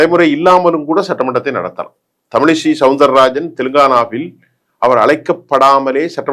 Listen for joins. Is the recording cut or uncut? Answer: uncut